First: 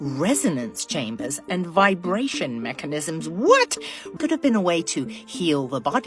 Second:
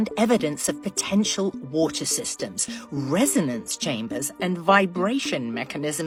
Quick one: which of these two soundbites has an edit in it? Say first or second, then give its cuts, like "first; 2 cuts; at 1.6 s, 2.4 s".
first; 1 cut; at 4.1 s